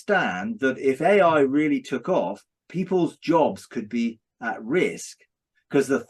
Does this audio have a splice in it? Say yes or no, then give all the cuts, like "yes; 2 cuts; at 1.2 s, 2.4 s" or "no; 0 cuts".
no; 0 cuts